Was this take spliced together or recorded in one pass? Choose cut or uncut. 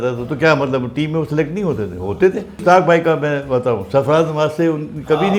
cut